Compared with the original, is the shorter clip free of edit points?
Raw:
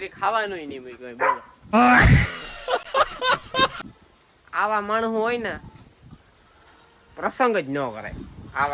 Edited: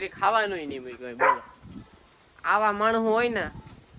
no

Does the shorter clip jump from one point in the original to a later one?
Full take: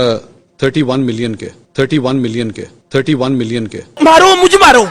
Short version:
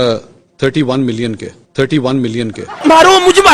yes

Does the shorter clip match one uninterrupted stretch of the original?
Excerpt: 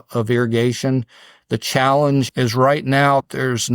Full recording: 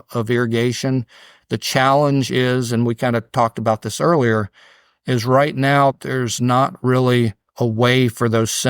no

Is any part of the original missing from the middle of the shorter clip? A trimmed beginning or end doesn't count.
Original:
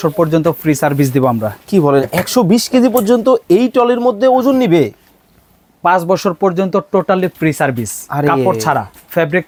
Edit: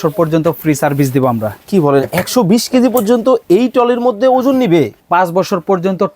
yes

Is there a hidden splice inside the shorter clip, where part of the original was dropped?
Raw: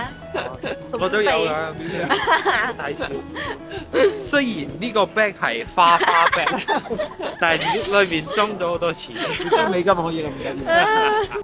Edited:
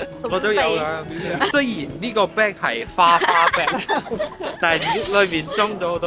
yes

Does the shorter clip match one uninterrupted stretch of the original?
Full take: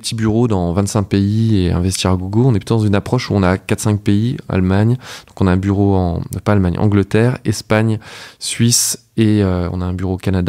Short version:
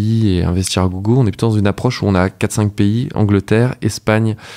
no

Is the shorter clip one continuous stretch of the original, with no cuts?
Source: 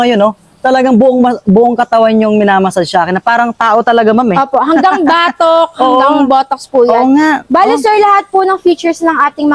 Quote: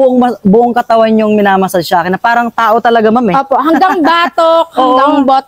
yes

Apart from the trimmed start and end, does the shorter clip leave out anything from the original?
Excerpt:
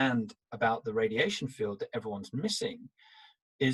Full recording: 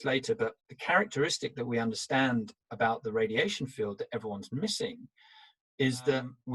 no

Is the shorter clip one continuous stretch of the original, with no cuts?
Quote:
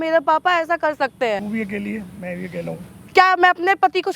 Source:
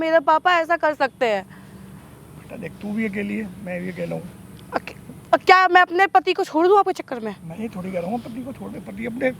no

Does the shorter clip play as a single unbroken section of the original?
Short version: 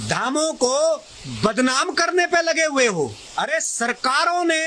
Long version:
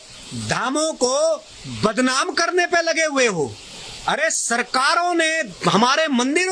no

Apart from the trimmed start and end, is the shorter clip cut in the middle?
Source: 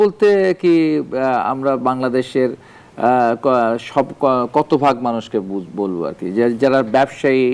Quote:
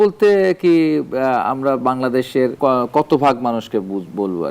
yes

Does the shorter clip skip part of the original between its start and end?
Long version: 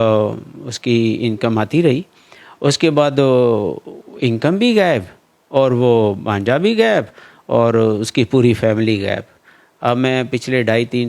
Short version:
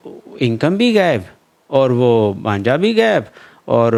no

